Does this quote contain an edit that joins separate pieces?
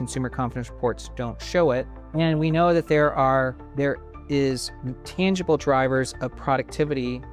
yes; 2 cuts; at 2.0 s, 3.6 s

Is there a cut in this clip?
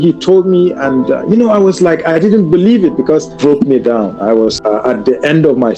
yes; 2 cuts; at 3.3 s, 4.6 s

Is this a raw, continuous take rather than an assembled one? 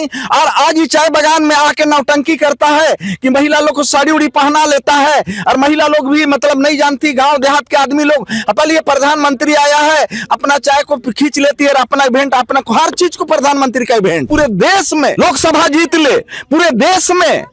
no; 2 cuts; at 14.3 s, 15.1 s

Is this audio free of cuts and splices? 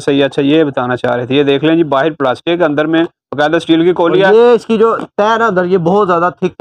yes; 0 cuts

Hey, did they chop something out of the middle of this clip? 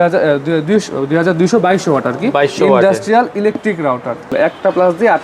yes; 1 cut; at 4.3 s

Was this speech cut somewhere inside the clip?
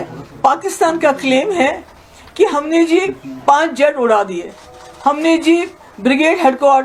no; 0 cuts

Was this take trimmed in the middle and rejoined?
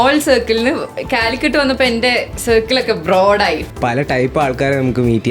yes; 1 cut; at 3.6 s

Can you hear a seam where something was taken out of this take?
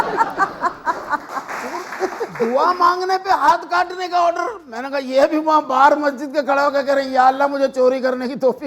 yes; 1 cut; at 1.5 s

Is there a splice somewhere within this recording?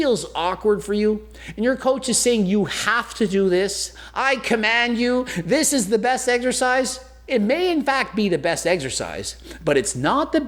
no; 0 cuts

